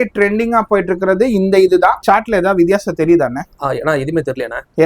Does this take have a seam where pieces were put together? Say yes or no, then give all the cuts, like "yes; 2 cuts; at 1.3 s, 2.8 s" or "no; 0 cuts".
yes; 1 cut; at 2.0 s